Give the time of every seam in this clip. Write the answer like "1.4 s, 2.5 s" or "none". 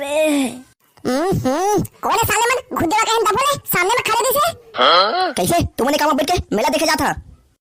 none